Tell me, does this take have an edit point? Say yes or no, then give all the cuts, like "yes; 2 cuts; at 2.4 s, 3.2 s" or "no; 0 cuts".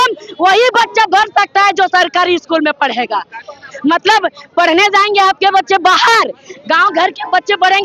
no; 0 cuts